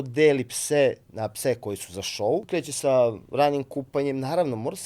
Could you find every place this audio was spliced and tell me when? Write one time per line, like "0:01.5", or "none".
0:02.5